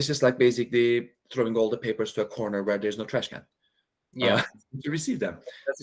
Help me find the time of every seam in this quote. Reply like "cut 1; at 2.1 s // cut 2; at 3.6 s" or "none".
none